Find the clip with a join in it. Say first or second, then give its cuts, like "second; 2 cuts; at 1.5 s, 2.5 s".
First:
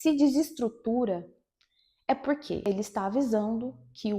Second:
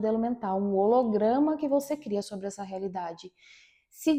first; 1 cut; at 2.6 s